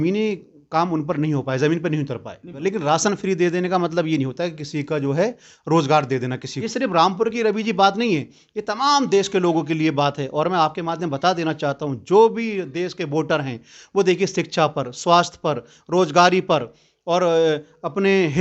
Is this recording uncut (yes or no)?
no